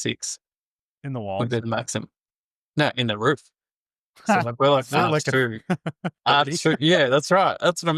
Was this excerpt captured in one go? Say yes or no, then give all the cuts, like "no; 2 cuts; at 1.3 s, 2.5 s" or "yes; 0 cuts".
yes; 0 cuts